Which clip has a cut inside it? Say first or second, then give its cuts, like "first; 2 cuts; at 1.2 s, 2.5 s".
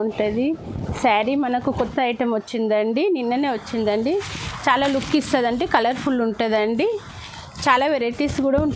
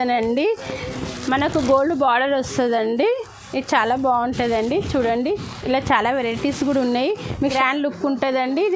second; 1 cut; at 7.5 s